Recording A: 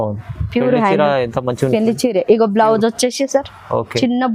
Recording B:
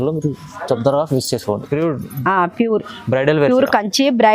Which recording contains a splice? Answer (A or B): B